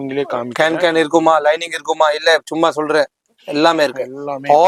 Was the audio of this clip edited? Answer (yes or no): no